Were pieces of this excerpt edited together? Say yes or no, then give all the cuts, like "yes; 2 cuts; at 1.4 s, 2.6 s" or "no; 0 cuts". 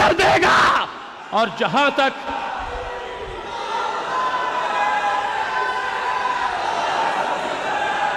no; 0 cuts